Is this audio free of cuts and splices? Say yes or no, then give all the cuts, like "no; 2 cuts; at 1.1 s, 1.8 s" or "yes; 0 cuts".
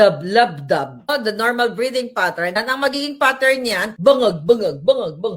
no; 3 cuts; at 1.1 s, 2.6 s, 3.9 s